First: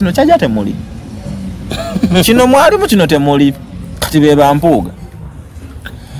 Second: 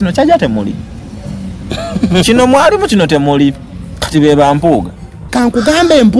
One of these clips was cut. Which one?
second; 1 cut; at 5.2 s

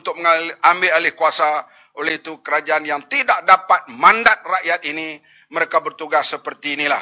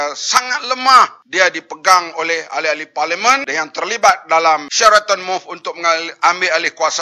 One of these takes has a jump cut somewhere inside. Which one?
second; 3 cuts; at 1.2 s, 3.5 s, 4.7 s

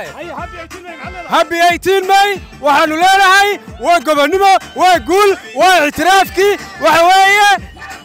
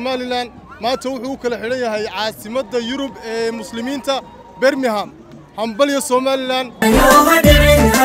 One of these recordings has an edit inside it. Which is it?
second; 1 cut; at 6.8 s

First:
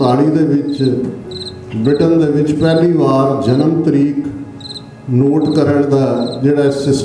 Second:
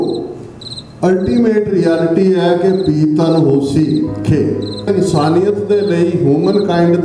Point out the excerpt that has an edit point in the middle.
second; 1 cut; at 4.9 s

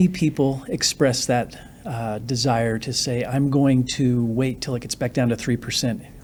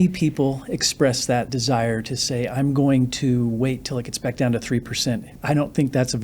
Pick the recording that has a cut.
second; 2 cuts; at 1.5 s, 5.3 s

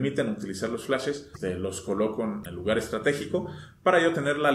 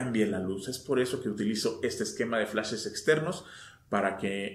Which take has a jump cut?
first; 2 cuts; at 1.3 s, 2.4 s

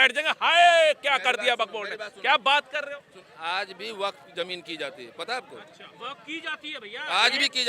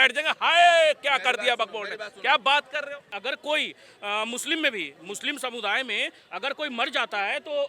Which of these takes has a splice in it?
second; 1 cut; at 3.1 s

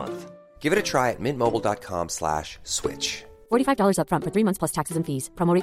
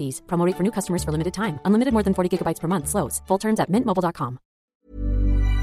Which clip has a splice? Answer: second; 1 cut; at 4.6 s

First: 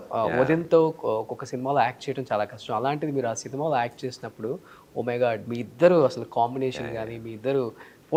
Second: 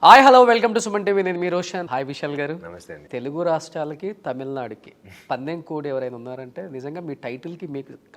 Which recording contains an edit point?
second; 1 cut; at 1.9 s

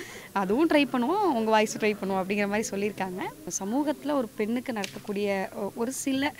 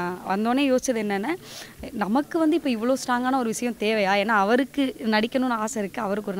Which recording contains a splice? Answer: first; 1 cut; at 3.5 s

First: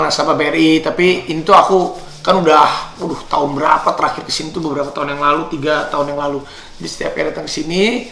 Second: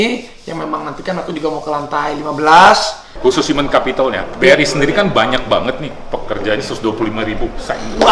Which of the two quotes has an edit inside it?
second; 1 cut; at 3.0 s

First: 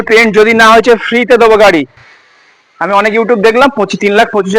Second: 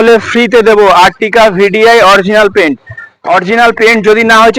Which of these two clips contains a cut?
first; 1 cut; at 2.0 s

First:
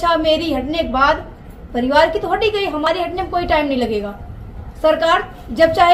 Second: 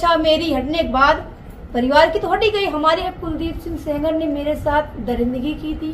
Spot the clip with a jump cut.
second; 1 cut; at 2.9 s

